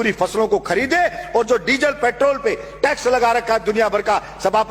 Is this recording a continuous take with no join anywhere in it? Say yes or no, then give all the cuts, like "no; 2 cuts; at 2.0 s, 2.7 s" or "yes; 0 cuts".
yes; 0 cuts